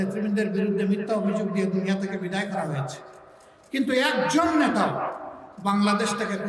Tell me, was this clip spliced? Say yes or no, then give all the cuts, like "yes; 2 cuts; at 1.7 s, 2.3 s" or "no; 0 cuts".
no; 0 cuts